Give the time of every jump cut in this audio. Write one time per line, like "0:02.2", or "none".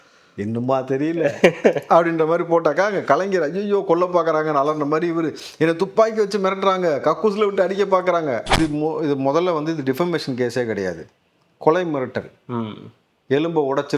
0:08.5